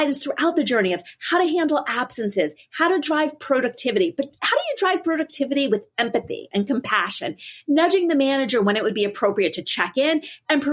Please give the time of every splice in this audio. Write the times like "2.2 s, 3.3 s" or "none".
none